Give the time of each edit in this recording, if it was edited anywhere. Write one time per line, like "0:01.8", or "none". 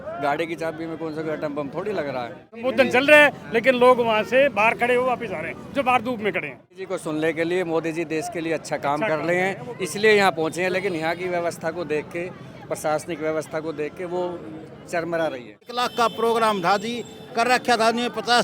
0:02.6
0:06.7
0:15.9